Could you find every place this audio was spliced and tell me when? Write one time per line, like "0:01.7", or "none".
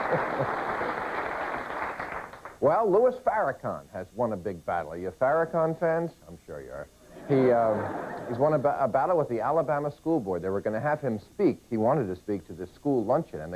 none